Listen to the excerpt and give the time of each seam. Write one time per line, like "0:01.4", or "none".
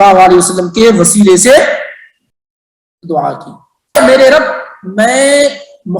0:04.0

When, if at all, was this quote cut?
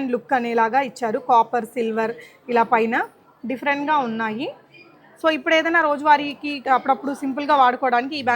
0:06.6

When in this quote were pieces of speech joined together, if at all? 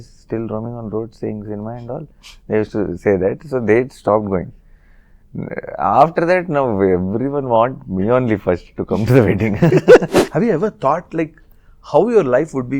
0:10.2

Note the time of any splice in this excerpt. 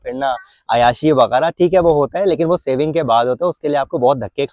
none

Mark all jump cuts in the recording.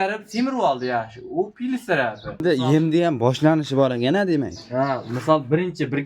0:02.4

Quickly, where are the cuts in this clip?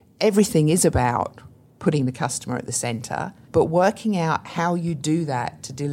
0:03.4

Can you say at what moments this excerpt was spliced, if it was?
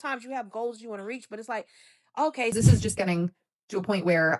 0:02.5

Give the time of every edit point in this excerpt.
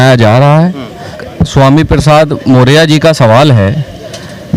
0:01.2

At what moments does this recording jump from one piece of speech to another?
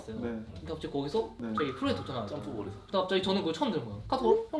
0:01.4
0:02.8

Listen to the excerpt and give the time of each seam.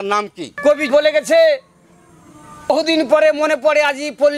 0:00.8
0:02.7

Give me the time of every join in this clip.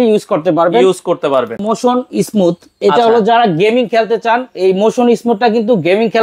0:01.6

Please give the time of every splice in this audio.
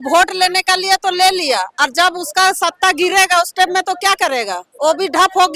0:04.6

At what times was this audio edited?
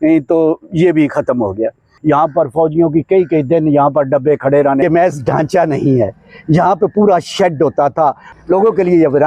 0:01.9
0:04.8
0:08.3

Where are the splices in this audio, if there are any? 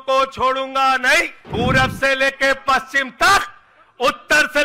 0:01.4

